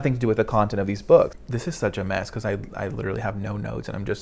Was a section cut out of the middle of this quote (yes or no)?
yes